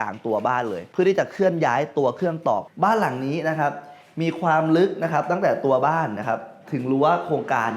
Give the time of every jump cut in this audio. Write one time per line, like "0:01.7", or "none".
0:02.6

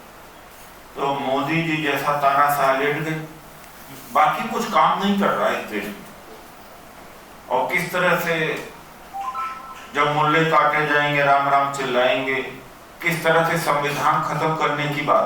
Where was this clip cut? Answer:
0:06.2

